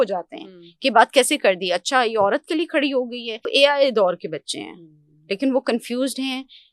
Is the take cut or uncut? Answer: cut